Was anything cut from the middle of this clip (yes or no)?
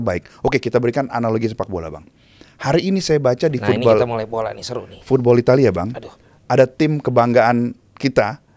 no